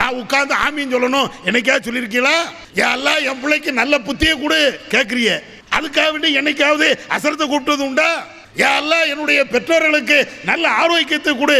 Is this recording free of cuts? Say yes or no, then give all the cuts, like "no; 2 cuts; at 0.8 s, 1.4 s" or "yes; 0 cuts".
no; 3 cuts; at 2.6 s, 5.5 s, 8.4 s